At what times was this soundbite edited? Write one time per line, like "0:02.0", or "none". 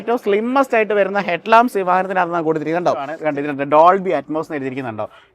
0:03.1